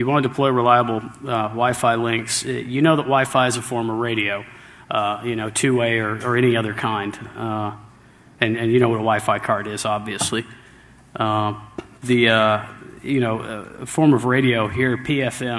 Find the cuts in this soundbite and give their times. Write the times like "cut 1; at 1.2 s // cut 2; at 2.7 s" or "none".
cut 1; at 10.0 s

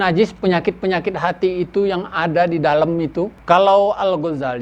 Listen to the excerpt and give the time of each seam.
cut 1; at 3.4 s

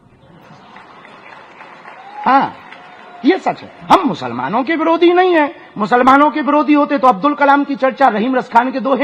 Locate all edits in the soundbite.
none

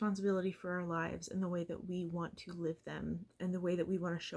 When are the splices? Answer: cut 1; at 3.3 s

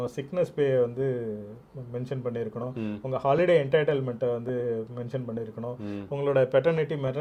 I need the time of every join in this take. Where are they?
none

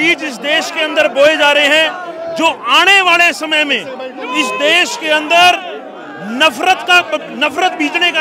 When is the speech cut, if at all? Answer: none

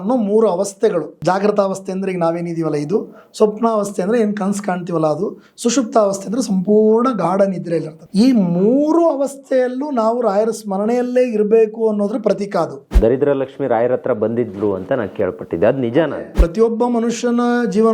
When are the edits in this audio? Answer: cut 1; at 1.1 s // cut 2; at 8.0 s // cut 3; at 12.9 s // cut 4; at 16.4 s

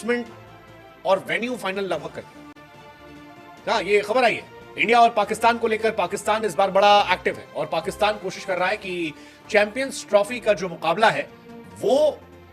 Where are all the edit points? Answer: none

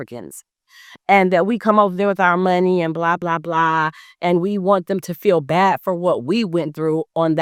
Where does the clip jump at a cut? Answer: none

